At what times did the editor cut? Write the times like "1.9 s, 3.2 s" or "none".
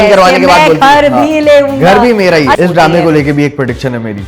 2.6 s